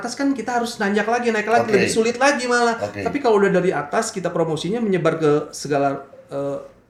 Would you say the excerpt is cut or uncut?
uncut